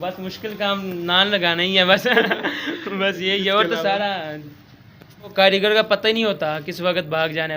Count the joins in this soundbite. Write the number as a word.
one